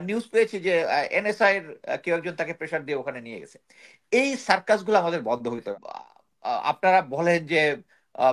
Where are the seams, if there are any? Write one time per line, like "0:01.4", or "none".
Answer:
0:05.7